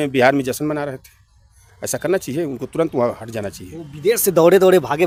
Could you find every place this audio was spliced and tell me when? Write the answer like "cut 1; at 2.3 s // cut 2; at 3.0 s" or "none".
none